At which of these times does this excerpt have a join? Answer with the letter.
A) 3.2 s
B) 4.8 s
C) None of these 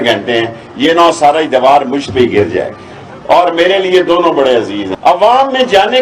B